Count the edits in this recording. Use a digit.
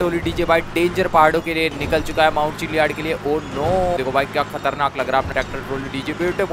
1